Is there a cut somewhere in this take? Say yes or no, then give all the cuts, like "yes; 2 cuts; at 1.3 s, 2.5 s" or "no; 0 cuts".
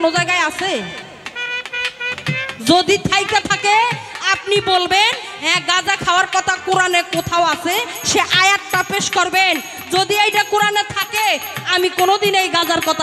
no; 0 cuts